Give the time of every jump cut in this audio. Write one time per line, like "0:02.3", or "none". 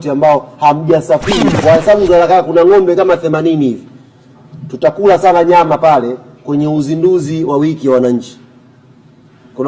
0:01.6